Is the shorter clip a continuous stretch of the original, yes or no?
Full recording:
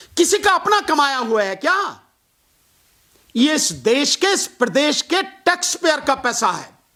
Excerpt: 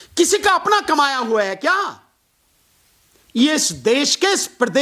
yes